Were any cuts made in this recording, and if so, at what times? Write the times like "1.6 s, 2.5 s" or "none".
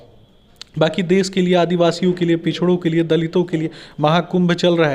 none